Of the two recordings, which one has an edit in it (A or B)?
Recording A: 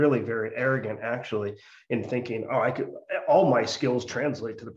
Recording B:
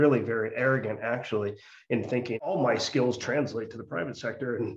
B